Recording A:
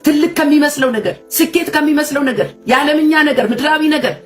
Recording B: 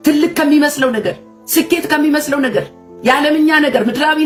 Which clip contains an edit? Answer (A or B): A